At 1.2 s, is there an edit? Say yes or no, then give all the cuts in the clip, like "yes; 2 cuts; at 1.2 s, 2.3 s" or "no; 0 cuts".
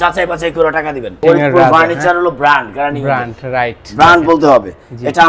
yes; 1 cut; at 1.2 s